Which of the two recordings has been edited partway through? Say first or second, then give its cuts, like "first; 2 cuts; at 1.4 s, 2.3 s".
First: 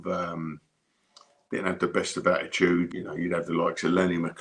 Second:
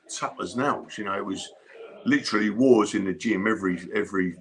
first; 1 cut; at 3.0 s